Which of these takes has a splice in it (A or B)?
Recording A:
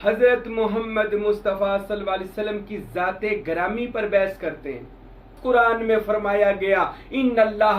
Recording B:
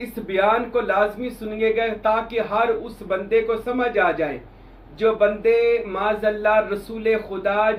A